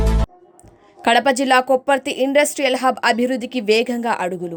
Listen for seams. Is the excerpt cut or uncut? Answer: uncut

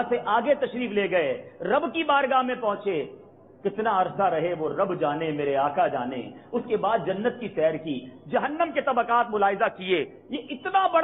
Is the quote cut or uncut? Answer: uncut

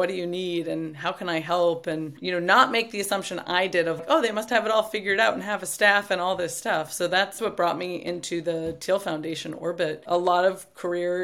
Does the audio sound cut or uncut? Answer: cut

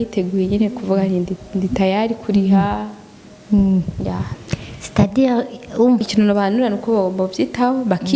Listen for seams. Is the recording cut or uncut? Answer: cut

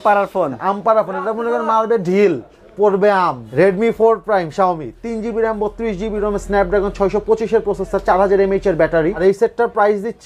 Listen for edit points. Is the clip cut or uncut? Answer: cut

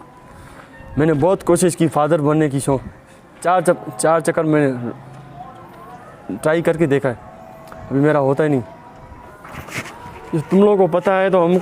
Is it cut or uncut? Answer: cut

